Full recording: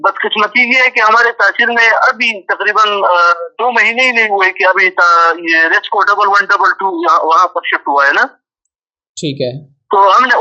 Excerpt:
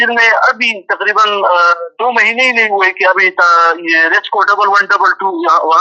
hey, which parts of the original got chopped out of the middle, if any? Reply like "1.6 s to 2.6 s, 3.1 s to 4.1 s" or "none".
none